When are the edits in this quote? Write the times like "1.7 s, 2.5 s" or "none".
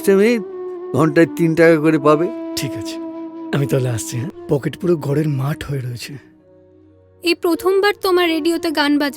4.4 s